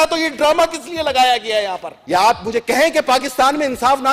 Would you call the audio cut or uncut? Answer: cut